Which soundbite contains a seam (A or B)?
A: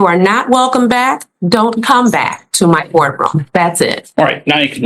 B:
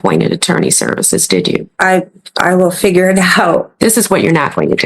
B